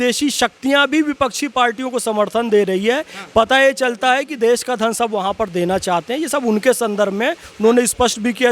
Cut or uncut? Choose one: uncut